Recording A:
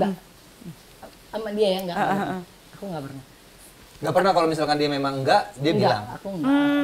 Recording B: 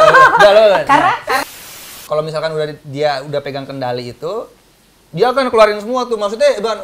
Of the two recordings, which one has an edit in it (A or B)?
B